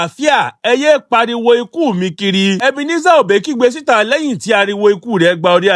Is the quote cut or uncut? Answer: uncut